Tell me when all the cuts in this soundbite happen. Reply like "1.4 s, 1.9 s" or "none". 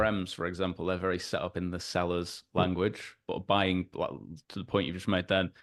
none